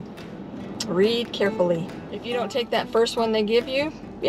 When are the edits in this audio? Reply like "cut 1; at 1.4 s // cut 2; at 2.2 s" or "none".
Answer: cut 1; at 2.2 s